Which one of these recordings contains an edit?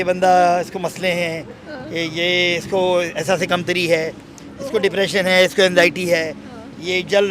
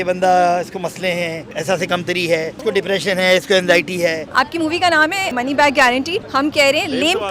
second; 5 cuts; at 1.5 s, 2.5 s, 4.3 s, 5.3 s, 6.2 s

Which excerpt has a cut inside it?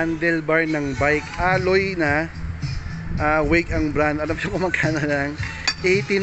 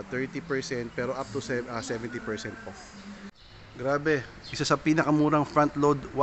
second; 1 cut; at 3.3 s

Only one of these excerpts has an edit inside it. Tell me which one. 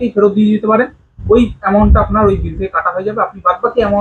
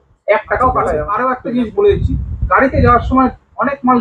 second; 1 cut; at 1.1 s

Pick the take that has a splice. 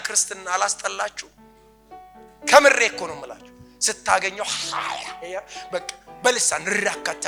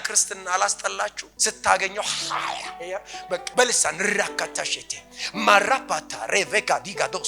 second; 2 cuts; at 1.3 s, 3.5 s

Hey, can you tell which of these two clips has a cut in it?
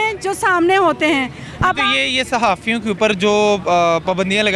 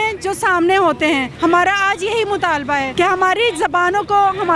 second; 2 cuts; at 1.3 s, 2.9 s

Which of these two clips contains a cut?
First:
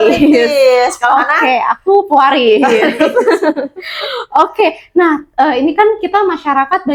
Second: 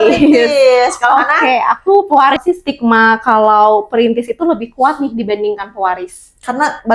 second; 1 cut; at 2.4 s

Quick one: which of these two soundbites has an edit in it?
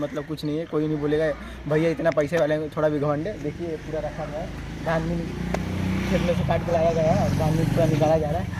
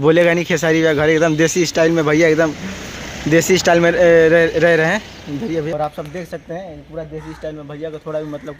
second; 1 cut; at 5.7 s

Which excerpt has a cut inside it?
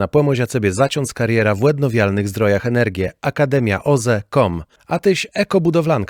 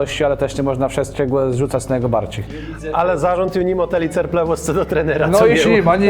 second; 1 cut; at 2.7 s

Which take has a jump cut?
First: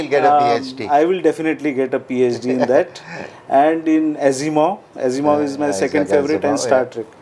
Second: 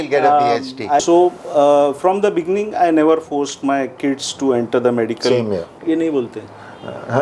second; 2 cuts; at 1.0 s, 5.7 s

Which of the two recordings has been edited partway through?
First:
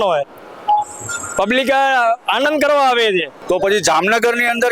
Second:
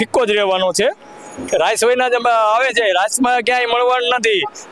first; 1 cut; at 3.3 s

